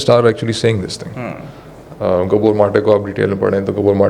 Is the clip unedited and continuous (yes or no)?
yes